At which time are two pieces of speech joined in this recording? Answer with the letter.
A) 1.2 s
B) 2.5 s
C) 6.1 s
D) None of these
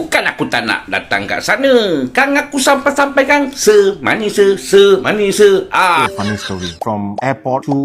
C